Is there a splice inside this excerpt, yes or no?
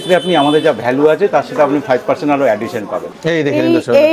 yes